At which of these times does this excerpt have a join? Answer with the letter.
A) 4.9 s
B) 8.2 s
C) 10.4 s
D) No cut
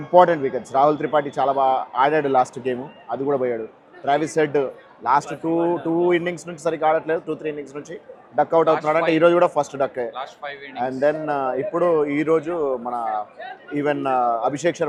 D